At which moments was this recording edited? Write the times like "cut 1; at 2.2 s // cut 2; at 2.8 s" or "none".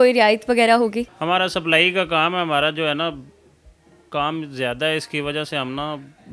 cut 1; at 1.1 s